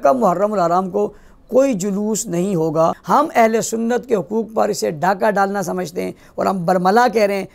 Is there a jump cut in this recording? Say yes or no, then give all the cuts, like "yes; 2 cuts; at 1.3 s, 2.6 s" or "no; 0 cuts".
yes; 1 cut; at 3.0 s